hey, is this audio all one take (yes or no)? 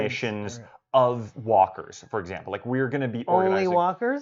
yes